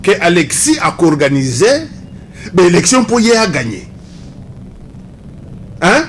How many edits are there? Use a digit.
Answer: 0